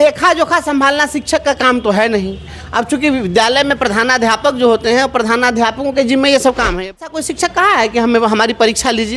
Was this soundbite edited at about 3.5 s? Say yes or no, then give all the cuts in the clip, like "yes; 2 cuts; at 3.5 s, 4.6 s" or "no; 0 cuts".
no; 1 cut; at 7.1 s